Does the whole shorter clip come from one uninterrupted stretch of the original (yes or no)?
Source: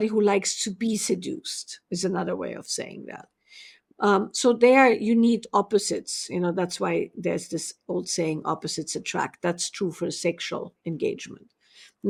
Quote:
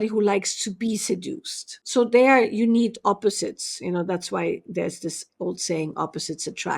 no